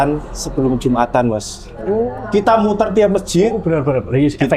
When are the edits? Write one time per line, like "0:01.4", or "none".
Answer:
none